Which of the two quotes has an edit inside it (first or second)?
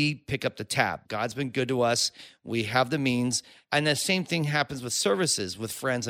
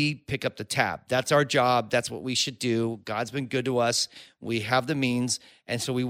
first